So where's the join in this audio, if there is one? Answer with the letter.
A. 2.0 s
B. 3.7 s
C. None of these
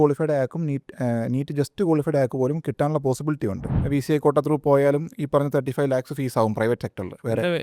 B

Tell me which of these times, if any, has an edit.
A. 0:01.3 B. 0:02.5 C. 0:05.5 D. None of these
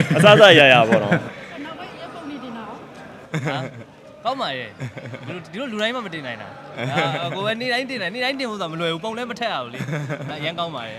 A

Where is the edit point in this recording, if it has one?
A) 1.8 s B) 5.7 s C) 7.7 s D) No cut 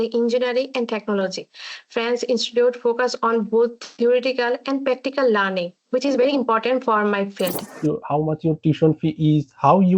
C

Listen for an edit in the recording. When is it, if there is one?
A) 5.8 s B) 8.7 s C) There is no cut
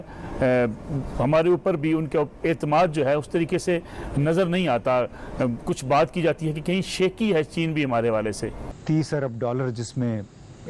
B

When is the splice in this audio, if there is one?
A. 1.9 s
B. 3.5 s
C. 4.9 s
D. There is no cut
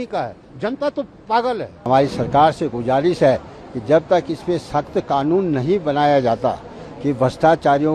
A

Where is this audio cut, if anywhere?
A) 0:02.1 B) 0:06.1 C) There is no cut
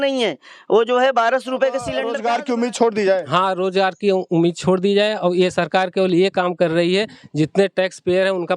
A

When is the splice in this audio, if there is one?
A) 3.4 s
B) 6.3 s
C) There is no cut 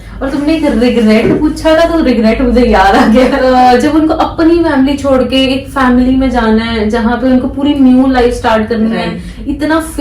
A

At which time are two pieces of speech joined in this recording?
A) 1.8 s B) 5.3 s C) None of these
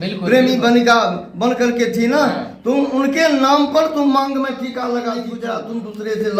B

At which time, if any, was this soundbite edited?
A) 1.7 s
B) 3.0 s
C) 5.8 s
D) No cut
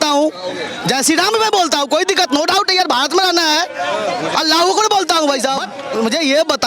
C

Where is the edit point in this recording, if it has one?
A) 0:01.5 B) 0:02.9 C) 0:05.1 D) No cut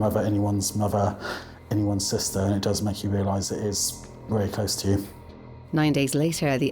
D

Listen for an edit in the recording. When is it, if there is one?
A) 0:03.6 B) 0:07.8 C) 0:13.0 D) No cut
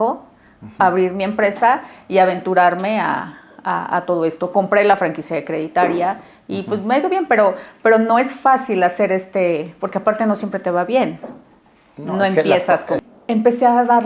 C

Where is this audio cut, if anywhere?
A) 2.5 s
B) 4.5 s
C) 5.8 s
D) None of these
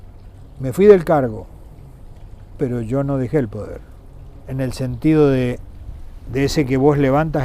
B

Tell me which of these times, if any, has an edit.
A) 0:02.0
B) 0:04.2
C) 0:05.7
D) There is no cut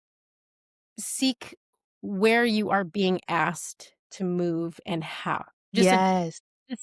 C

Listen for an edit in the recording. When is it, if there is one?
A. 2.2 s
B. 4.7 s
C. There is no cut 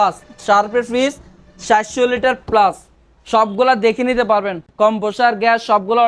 C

